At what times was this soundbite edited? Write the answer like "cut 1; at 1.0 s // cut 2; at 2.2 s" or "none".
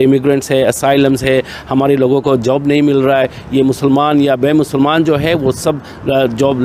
none